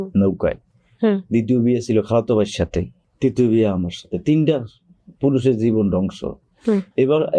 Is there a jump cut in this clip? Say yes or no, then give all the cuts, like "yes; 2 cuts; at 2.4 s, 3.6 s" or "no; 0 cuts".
no; 0 cuts